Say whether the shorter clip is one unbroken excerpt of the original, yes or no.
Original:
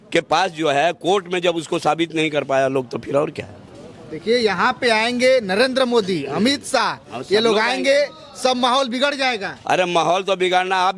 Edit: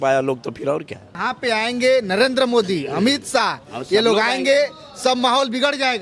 no